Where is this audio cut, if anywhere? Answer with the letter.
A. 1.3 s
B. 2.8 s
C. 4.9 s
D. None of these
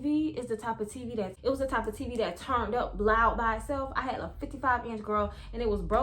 A